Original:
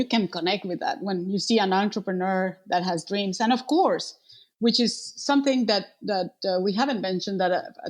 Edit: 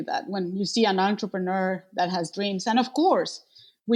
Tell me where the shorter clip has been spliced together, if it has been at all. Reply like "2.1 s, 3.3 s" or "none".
none